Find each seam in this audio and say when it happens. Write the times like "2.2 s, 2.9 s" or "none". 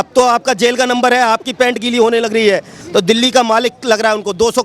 2.8 s

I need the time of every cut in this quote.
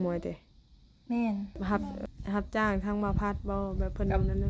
1.6 s

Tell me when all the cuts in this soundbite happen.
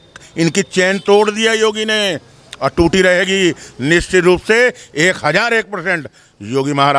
none

